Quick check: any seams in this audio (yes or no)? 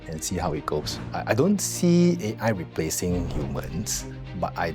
yes